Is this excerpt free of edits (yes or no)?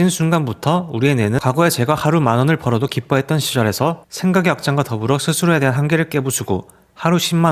no